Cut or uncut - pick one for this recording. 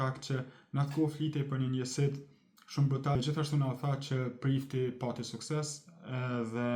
cut